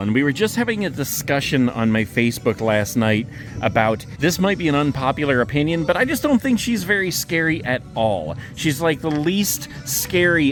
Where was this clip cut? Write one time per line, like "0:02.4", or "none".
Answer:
none